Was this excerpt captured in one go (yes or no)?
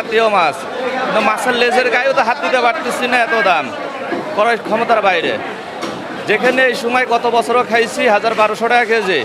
yes